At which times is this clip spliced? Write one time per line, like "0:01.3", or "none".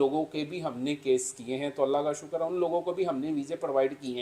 none